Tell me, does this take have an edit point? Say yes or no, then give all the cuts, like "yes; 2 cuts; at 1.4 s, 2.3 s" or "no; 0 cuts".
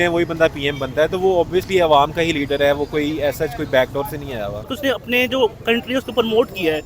yes; 1 cut; at 4.7 s